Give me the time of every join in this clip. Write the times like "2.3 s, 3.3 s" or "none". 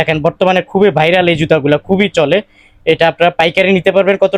none

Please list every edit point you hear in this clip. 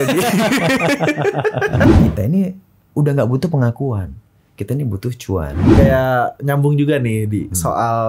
1.9 s, 5.7 s

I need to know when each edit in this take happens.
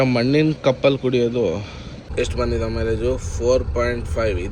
2.0 s

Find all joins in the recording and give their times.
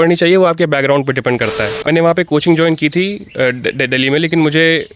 1.8 s

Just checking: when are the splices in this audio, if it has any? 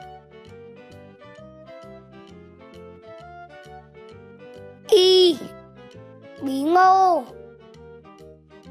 4.2 s, 7.3 s

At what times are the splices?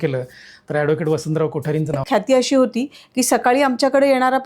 2.0 s

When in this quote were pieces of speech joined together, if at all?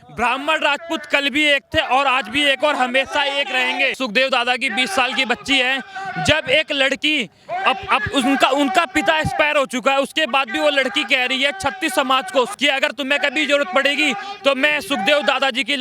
3.9 s, 12.5 s

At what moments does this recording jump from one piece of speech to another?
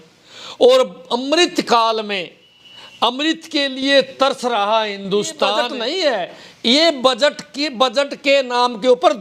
5.7 s

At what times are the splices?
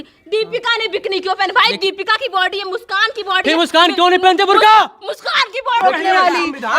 5.8 s

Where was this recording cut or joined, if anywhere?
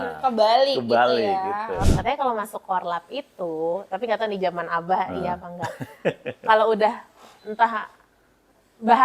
1.9 s

